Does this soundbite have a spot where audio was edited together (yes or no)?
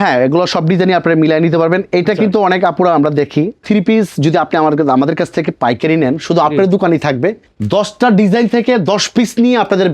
yes